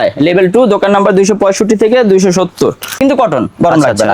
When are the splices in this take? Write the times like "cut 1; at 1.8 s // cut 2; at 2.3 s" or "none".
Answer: cut 1; at 3.0 s

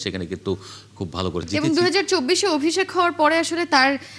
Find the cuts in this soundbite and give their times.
cut 1; at 1.5 s

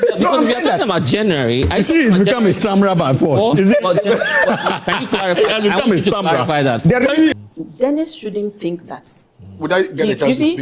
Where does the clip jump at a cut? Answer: cut 1; at 7.3 s

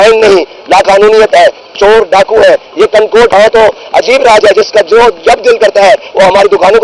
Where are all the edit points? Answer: cut 1; at 3.3 s

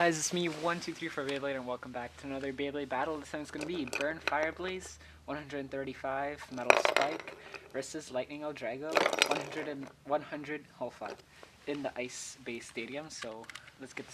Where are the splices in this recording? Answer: none

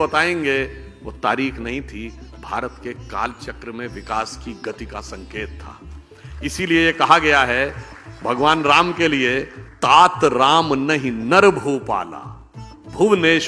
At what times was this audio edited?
cut 1; at 9.6 s

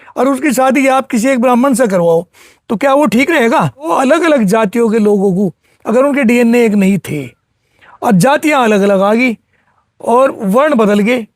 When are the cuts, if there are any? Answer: cut 1; at 3.9 s

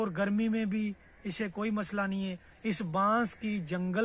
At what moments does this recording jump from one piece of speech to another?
cut 1; at 2.5 s

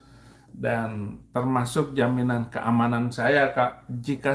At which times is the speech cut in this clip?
none

